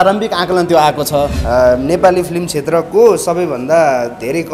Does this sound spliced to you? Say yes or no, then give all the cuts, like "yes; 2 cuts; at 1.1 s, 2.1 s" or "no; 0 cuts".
yes; 1 cut; at 1.4 s